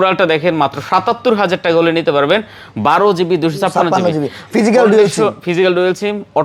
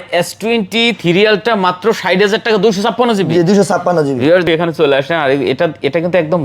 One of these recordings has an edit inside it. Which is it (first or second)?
second